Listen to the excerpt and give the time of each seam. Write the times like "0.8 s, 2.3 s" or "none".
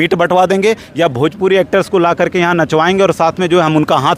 none